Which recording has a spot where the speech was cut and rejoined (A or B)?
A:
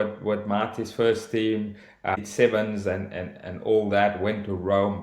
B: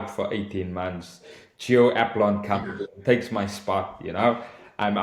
A